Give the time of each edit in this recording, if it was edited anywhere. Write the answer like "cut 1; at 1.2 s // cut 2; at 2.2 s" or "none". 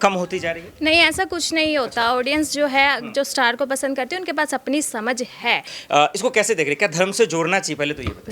cut 1; at 5.7 s